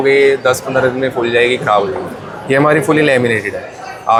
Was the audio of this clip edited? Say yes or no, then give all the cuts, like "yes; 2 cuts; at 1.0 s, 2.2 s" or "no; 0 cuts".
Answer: no; 0 cuts